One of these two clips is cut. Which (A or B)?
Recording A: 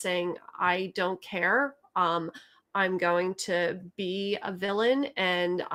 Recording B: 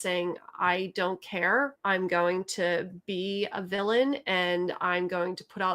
B